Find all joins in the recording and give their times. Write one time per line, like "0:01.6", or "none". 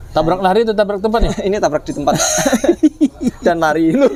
none

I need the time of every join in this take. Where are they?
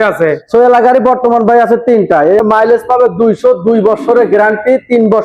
0:02.4

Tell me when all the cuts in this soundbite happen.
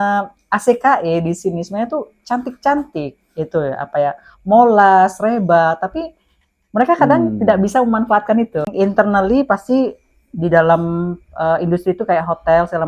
0:08.7

